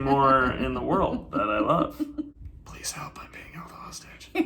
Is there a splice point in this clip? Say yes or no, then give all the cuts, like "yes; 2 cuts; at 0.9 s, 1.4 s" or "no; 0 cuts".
yes; 1 cut; at 2.3 s